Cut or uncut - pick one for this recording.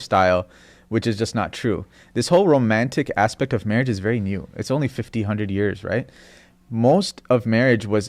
uncut